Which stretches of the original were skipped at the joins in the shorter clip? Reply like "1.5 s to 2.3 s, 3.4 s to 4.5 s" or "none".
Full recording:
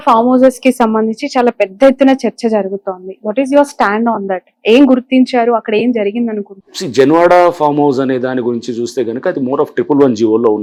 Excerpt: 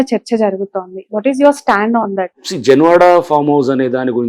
4.4 s to 6.6 s